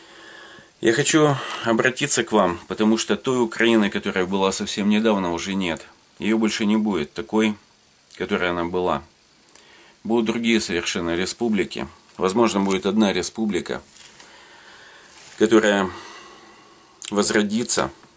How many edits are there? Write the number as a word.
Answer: one